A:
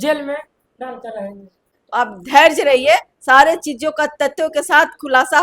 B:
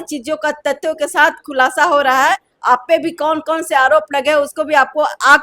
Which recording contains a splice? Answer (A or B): A